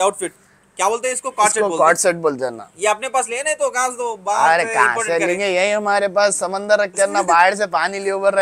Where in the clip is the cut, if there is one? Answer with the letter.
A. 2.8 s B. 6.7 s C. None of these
C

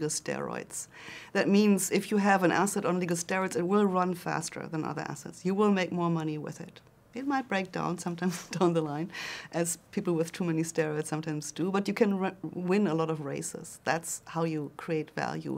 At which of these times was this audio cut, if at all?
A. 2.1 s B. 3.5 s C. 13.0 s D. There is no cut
D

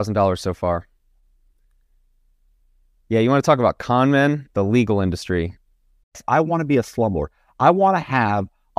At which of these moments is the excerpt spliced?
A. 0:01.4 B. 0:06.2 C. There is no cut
B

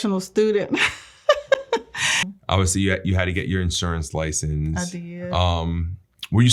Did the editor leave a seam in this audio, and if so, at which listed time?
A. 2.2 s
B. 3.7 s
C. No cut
A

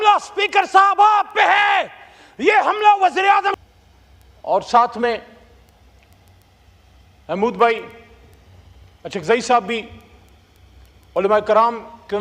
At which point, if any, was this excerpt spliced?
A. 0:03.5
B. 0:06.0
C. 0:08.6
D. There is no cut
A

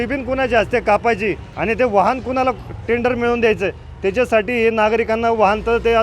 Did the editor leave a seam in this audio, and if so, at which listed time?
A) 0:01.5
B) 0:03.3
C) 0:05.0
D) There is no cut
A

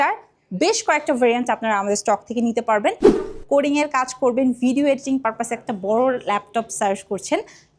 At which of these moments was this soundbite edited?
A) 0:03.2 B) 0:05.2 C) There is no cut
A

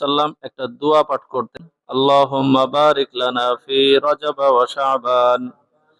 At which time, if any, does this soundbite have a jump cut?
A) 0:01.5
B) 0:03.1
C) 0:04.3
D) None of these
A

